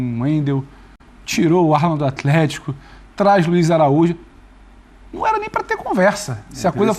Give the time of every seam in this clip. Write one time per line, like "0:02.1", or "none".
none